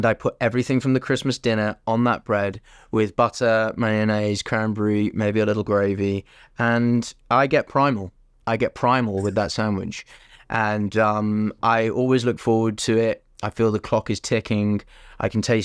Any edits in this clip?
no; 0 cuts

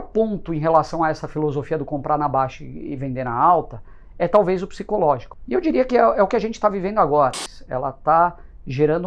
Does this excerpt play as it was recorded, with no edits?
no; 2 cuts; at 5.3 s, 7.4 s

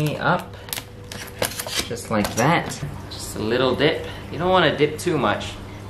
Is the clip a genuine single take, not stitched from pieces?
no; 1 cut; at 3.0 s

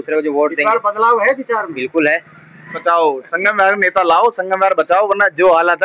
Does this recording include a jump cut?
yes; 1 cut; at 2.8 s

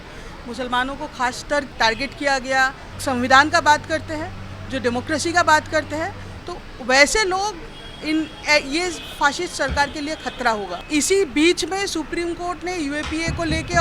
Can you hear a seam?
yes; 3 cuts; at 1.7 s, 2.9 s, 10.7 s

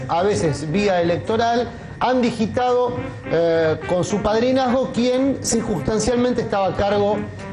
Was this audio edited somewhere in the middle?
no; 0 cuts

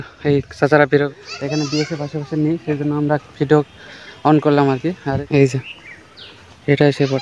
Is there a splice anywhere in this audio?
yes; 2 cuts; at 1.1 s, 5.2 s

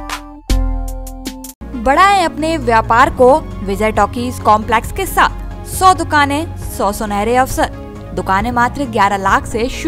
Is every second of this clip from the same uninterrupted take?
yes; 0 cuts

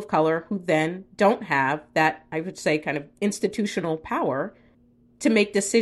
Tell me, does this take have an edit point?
no; 0 cuts

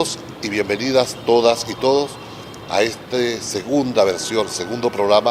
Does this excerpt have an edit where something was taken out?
no; 0 cuts

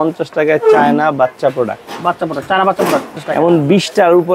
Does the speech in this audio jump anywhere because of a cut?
yes; 1 cut; at 3.2 s

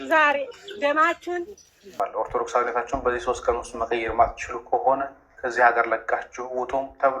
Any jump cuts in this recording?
yes; 1 cut; at 1.9 s

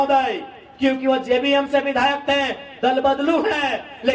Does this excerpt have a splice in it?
no; 0 cuts

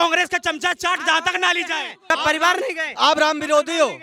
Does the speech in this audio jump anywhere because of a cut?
yes; 1 cut; at 2.1 s

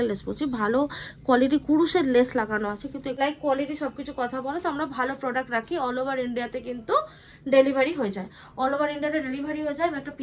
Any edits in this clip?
yes; 1 cut; at 3.2 s

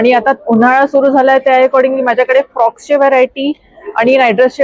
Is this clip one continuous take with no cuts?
yes; 0 cuts

